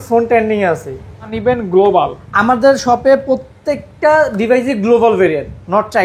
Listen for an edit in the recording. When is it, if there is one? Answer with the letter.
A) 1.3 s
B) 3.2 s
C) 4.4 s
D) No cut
A